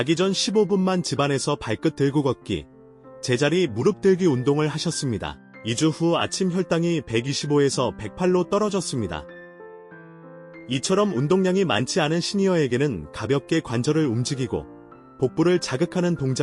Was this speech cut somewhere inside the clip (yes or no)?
no